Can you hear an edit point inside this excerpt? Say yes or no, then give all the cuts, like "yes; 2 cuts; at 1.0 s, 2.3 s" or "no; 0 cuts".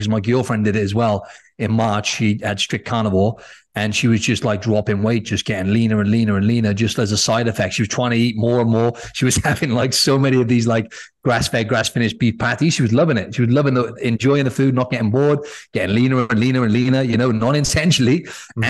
no; 0 cuts